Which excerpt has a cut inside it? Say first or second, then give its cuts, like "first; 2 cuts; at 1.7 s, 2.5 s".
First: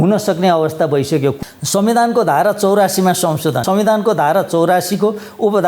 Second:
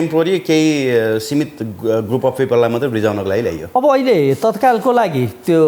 first; 2 cuts; at 1.4 s, 3.6 s